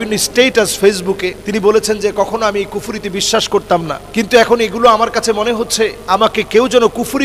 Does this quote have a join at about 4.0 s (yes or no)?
yes